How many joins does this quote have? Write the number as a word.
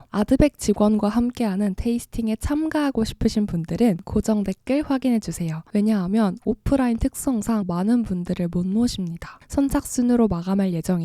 one